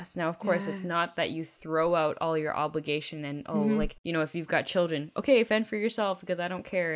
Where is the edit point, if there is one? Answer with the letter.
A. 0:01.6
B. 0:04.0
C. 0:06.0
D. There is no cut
B